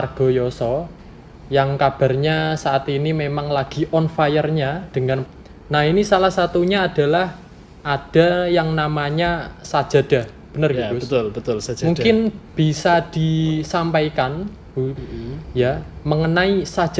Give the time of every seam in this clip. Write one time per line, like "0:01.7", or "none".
0:05.2
0:15.0